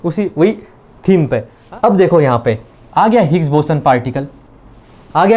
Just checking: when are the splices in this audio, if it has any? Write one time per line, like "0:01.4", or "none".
0:01.5